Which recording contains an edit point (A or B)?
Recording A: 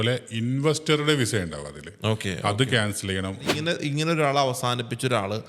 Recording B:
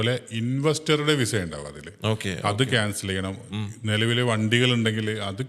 A